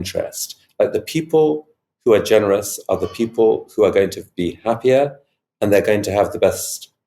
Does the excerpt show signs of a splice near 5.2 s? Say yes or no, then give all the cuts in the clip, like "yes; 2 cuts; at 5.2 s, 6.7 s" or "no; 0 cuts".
no; 0 cuts